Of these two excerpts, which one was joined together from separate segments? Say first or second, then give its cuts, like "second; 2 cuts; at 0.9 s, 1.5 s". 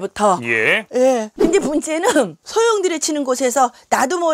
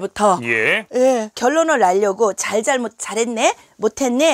first; 1 cut; at 1.3 s